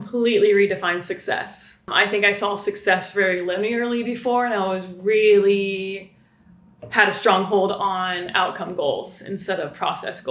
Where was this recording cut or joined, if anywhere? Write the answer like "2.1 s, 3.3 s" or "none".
1.9 s